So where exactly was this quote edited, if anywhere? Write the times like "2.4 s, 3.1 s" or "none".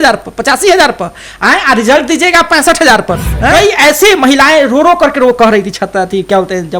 3.5 s